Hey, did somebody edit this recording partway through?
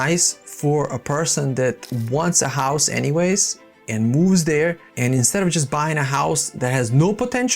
yes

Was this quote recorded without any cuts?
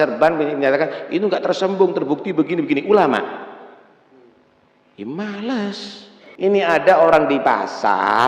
no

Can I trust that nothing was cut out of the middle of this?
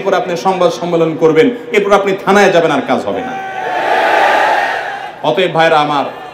yes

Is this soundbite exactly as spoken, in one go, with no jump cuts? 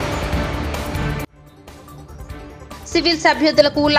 yes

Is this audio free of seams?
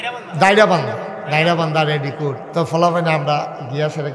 no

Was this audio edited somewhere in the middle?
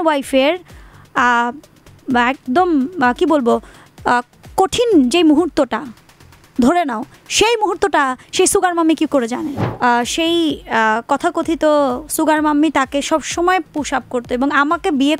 yes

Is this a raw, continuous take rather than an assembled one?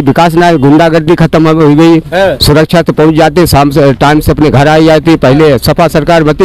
no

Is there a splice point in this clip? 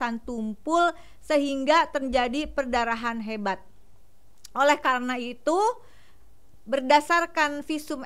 no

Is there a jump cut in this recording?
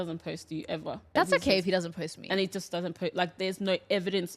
yes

